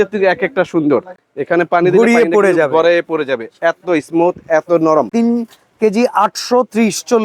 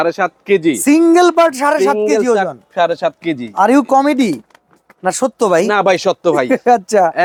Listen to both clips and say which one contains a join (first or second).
first